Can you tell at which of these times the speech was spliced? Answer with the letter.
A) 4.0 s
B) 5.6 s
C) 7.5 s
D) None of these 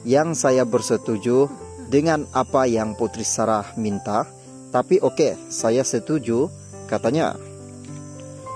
D